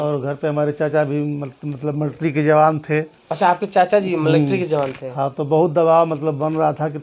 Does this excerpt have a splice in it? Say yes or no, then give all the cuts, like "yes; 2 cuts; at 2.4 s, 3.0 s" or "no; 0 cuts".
no; 0 cuts